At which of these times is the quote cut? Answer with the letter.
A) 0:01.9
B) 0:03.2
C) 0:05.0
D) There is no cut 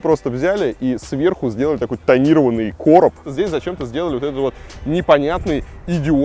B